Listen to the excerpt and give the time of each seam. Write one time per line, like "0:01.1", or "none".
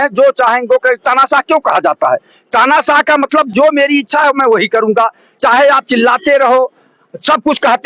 none

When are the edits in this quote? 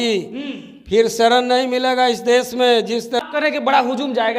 0:03.2

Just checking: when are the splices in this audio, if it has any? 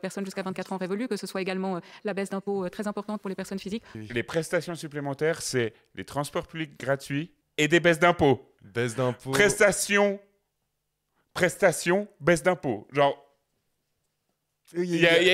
0:03.9
0:07.4
0:08.6

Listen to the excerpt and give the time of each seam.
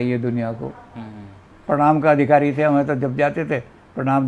0:01.5

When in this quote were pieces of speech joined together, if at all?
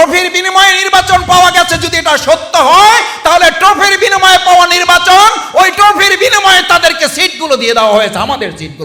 none

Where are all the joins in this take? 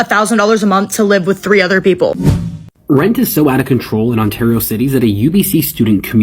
0:02.4

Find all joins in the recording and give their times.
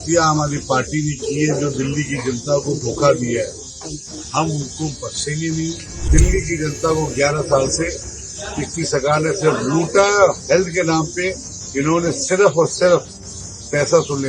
0:06.0

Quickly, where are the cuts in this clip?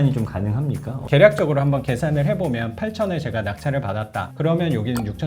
0:00.9

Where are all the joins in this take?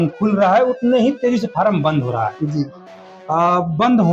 none

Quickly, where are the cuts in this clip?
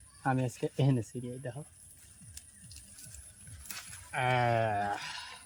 none

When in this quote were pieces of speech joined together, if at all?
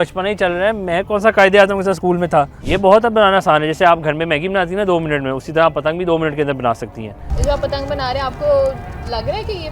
0:02.6
0:07.2

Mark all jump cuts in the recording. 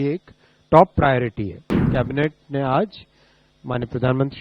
0:01.9

